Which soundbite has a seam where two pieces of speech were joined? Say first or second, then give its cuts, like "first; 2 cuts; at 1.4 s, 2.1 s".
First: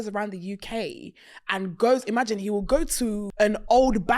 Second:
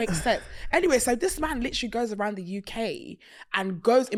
first; 1 cut; at 3.2 s